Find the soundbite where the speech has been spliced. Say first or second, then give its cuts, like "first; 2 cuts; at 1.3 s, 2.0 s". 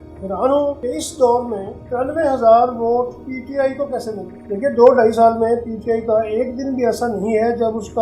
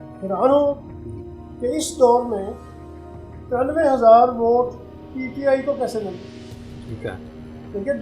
first; 4 cuts; at 0.8 s, 1.7 s, 3.3 s, 4.3 s